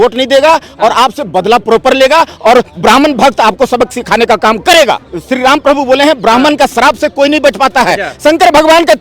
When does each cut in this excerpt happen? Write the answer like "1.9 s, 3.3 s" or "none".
5.0 s